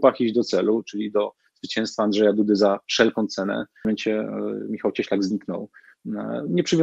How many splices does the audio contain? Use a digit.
1